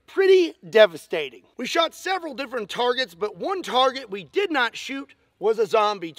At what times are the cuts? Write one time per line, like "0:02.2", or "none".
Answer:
none